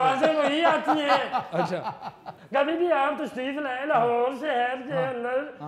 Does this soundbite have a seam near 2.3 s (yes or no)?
yes